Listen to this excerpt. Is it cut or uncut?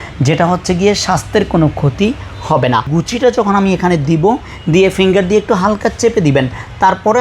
cut